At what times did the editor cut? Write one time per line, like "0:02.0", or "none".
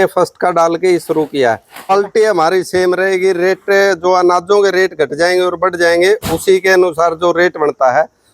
0:01.9